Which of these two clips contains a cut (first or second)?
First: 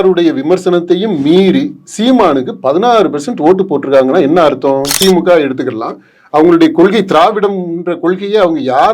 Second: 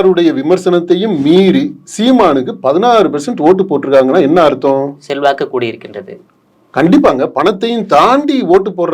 first